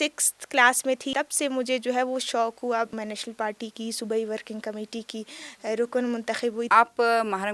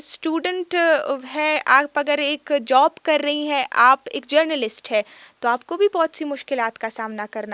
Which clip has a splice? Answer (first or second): first